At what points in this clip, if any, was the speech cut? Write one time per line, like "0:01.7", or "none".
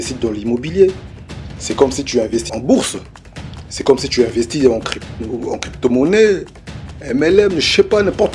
0:02.5